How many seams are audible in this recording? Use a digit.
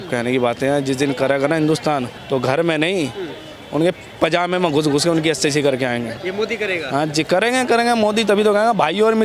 2